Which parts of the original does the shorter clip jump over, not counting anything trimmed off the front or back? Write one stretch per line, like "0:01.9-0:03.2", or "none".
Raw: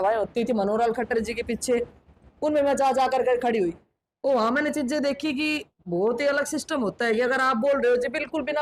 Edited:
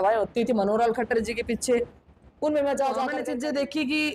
0:03.2-0:04.6